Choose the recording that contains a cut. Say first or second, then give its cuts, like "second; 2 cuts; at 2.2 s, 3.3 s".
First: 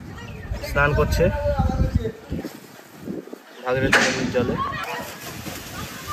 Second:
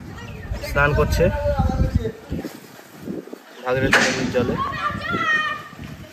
first; 1 cut; at 4.8 s